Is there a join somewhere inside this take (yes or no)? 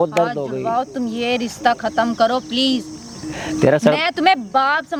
no